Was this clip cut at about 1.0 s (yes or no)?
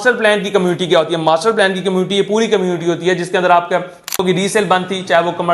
no